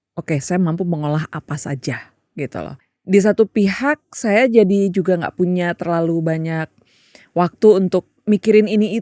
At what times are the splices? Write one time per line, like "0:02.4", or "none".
0:02.8

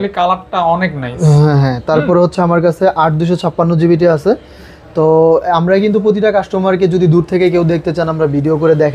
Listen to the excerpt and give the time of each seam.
none

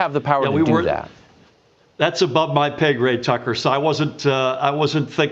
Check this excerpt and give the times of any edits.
none

